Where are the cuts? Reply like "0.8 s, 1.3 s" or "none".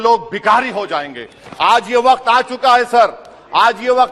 none